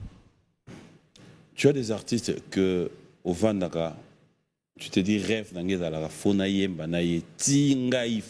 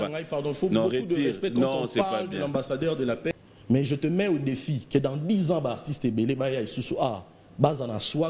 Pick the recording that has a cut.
second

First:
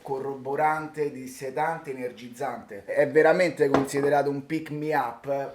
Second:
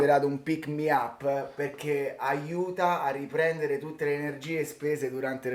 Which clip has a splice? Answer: first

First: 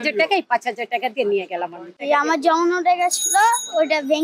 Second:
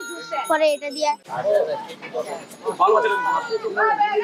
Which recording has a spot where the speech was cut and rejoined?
first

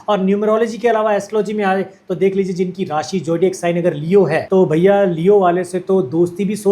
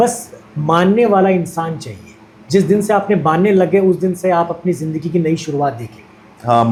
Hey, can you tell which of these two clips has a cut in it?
first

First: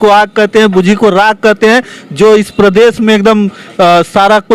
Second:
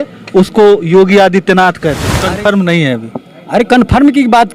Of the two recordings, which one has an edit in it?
second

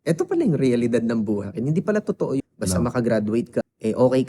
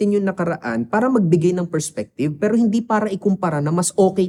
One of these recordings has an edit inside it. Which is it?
first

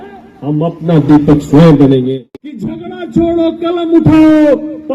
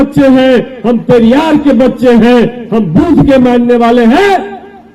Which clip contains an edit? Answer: first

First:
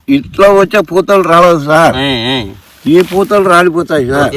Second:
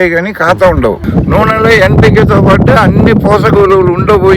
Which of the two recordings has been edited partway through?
second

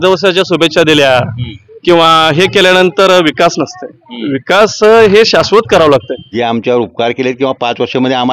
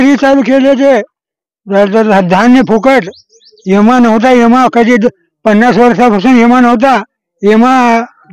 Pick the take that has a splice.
first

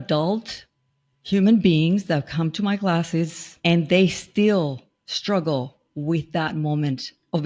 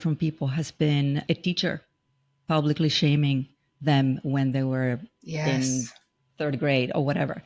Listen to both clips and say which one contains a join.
first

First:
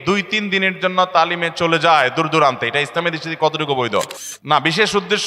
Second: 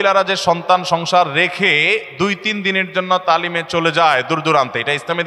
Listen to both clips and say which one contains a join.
first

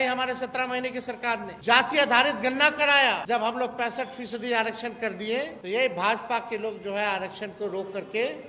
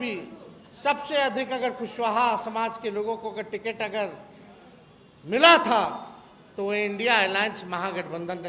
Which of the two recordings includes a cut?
first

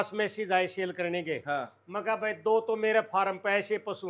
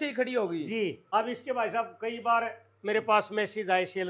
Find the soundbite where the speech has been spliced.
second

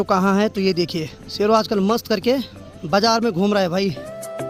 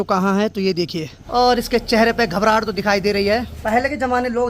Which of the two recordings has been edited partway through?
second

